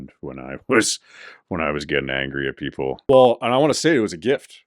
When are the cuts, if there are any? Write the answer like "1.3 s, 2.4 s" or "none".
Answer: 3.0 s